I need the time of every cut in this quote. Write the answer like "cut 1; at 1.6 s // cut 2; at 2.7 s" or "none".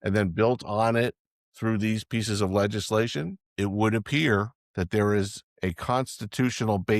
cut 1; at 3.4 s // cut 2; at 4.6 s // cut 3; at 5.4 s